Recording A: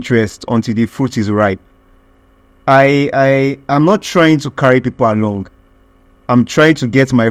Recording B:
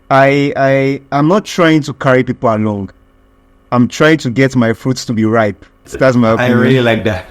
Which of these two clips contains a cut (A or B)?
B